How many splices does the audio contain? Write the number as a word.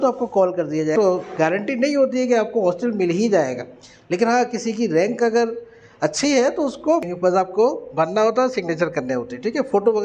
two